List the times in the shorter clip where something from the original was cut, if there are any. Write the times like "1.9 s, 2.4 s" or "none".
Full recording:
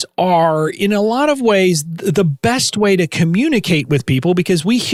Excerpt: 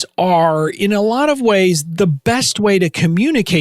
2.0 s